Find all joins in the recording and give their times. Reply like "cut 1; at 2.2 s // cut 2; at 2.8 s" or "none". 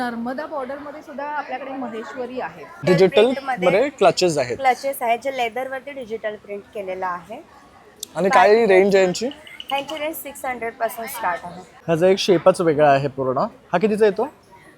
cut 1; at 2.8 s // cut 2; at 11.7 s